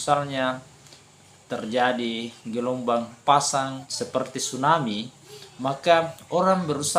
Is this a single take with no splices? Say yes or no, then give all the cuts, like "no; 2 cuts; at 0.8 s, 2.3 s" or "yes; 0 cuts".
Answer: no; 1 cut; at 3.8 s